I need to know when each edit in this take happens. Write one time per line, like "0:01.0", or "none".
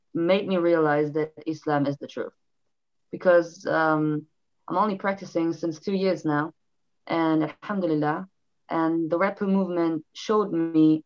none